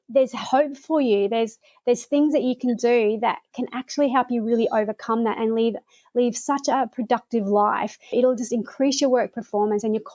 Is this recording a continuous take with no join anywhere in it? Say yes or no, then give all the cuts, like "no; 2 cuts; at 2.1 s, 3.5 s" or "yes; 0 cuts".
no; 1 cut; at 8.1 s